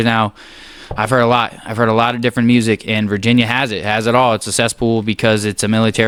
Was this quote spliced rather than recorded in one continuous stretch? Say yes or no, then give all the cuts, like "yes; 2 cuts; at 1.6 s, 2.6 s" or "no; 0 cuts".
no; 0 cuts